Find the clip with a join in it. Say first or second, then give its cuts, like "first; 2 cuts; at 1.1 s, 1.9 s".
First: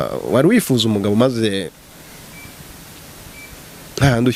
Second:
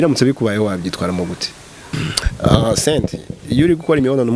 second; 1 cut; at 1.9 s